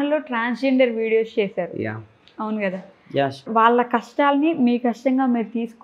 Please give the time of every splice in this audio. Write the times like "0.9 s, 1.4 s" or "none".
none